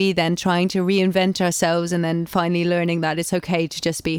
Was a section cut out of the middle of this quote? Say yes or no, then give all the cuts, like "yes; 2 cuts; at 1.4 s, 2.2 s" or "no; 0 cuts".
no; 0 cuts